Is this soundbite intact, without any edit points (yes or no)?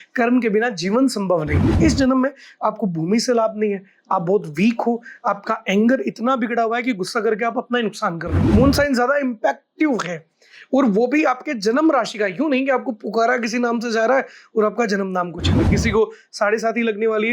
no